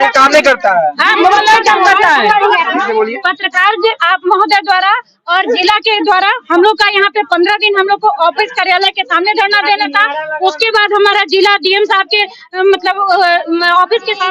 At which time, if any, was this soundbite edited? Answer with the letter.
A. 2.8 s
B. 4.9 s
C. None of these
A